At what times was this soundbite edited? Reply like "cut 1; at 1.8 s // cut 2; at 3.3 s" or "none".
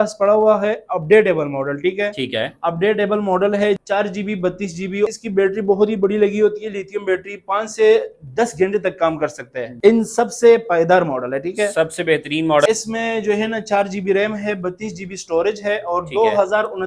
cut 1; at 3.8 s // cut 2; at 5.1 s // cut 3; at 9.6 s // cut 4; at 12.7 s